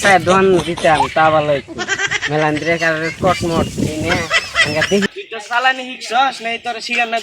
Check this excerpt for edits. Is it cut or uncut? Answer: cut